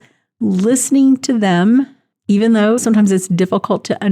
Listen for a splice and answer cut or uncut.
uncut